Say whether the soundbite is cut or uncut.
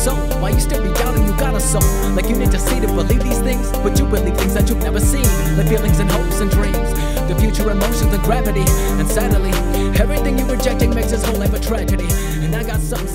uncut